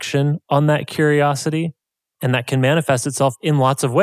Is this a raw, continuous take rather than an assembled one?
yes; 0 cuts

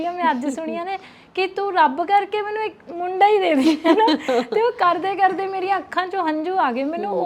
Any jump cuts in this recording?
no; 0 cuts

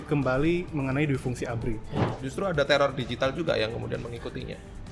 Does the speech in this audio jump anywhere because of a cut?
yes; 1 cut; at 2.1 s

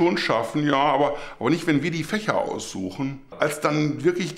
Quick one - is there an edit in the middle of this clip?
yes; 1 cut; at 3.2 s

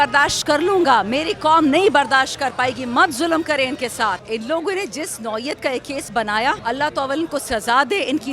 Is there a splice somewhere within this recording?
yes; 2 cuts; at 4.2 s, 6.6 s

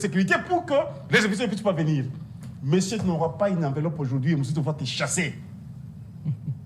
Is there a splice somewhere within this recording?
no; 0 cuts

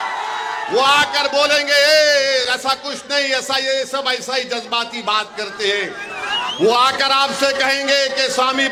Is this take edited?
no; 0 cuts

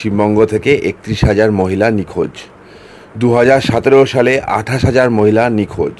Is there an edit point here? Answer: no; 0 cuts

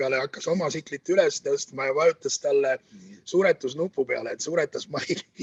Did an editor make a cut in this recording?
no; 0 cuts

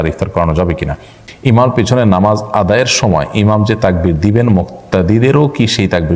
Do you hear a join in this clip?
yes; 1 cut; at 1.2 s

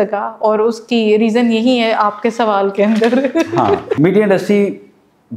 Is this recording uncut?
no; 1 cut; at 3.9 s

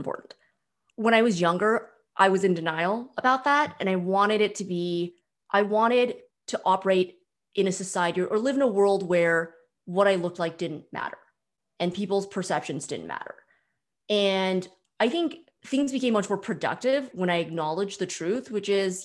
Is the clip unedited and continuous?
yes; 0 cuts

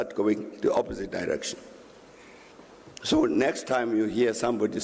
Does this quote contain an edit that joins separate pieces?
yes; 1 cut; at 2.5 s

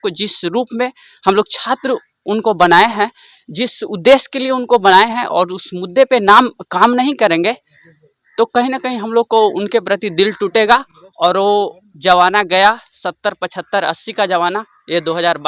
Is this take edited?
no; 0 cuts

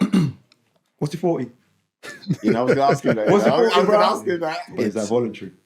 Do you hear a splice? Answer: yes; 1 cut; at 4.5 s

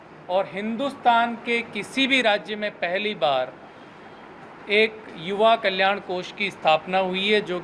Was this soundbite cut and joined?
no; 0 cuts

